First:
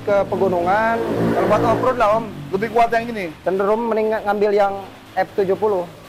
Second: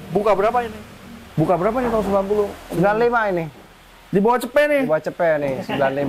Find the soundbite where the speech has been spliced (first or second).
second